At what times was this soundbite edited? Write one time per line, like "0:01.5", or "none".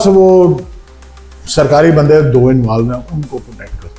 none

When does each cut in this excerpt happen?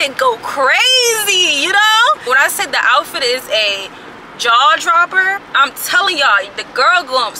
0:02.3
0:05.5

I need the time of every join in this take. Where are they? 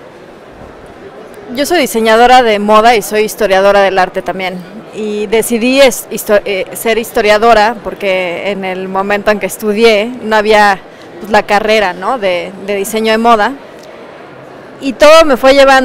0:01.4

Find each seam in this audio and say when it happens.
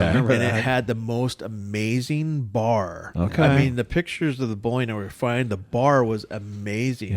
0:03.0

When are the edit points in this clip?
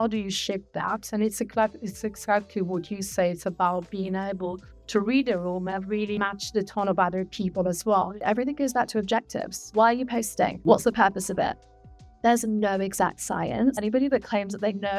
0:06.2
0:08.2
0:09.7
0:10.6
0:13.8

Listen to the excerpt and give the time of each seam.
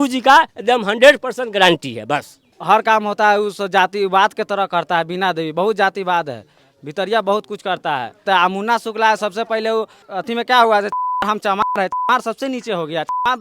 0:02.5
0:08.2
0:10.0

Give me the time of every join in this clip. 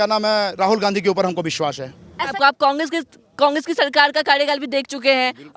0:02.3

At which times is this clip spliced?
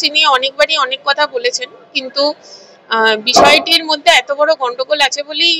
none

